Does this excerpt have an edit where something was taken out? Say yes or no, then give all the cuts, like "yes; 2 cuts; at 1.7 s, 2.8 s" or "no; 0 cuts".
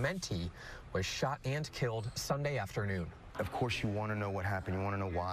yes; 1 cut; at 1.0 s